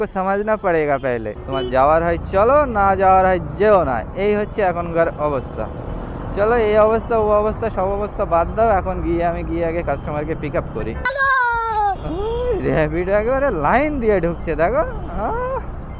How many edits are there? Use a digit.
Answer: 1